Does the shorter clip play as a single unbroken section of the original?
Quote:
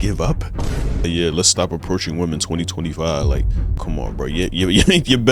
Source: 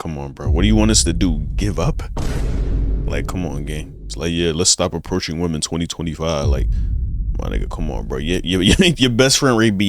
no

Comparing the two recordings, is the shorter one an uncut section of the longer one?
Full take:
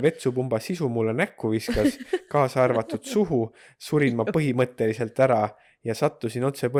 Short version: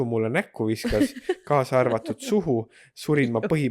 yes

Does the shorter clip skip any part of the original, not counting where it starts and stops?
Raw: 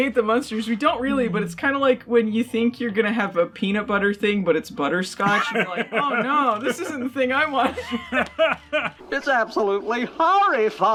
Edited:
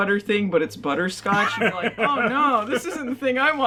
no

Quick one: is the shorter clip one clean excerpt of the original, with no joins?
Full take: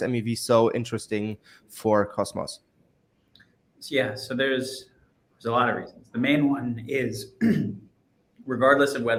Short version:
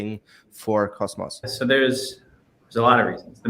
no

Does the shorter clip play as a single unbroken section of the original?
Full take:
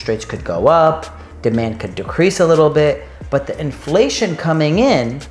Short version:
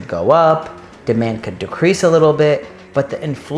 yes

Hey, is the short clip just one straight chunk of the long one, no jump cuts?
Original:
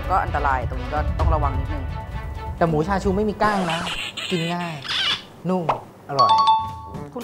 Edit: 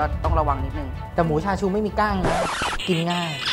no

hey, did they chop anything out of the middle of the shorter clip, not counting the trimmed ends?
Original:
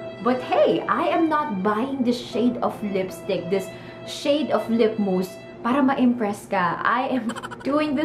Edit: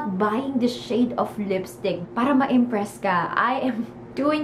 yes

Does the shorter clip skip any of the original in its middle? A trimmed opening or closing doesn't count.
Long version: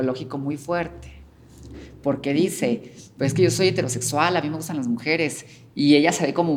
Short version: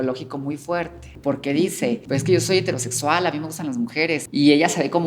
yes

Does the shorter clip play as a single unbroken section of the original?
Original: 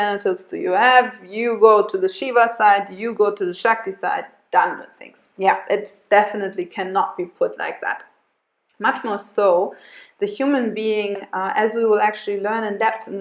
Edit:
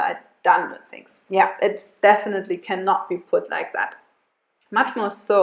yes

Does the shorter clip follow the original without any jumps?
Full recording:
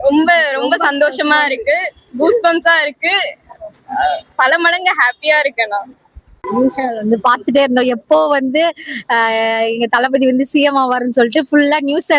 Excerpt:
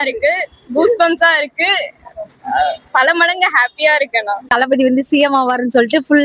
no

